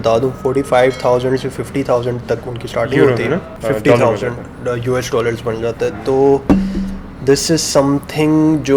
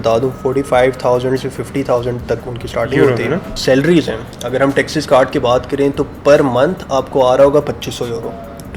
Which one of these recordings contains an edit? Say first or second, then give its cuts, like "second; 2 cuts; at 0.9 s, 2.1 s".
second; 1 cut; at 3.5 s